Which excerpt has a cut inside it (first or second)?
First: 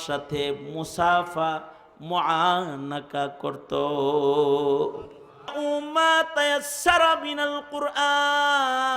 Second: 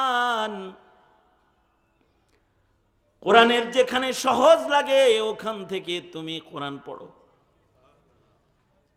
first